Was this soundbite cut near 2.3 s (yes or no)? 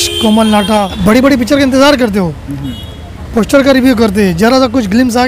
no